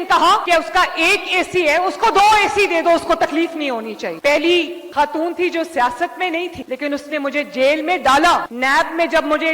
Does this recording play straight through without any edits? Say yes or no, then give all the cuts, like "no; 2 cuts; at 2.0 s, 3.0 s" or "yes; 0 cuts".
no; 1 cut; at 4.2 s